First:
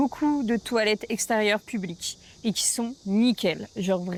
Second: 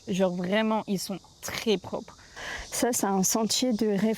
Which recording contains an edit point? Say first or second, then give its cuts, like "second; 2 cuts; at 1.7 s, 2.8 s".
second; 1 cut; at 2.4 s